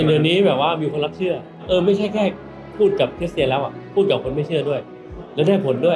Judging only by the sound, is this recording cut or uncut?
cut